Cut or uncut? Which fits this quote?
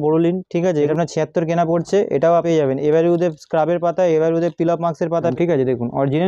cut